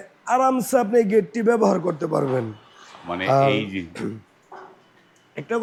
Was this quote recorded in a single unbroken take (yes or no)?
yes